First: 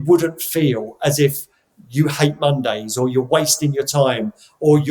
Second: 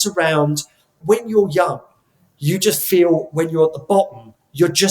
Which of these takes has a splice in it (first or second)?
second